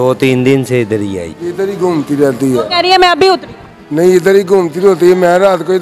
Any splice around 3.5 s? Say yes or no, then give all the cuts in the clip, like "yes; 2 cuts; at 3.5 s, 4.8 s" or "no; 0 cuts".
no; 1 cut; at 1.3 s